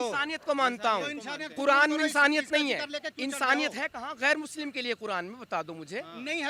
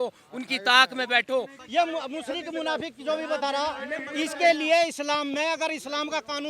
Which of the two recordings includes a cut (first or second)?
second